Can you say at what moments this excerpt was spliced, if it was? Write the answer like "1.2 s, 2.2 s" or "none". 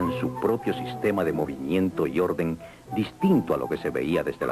1.1 s